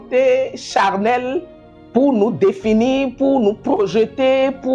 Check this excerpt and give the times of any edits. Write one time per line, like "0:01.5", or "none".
none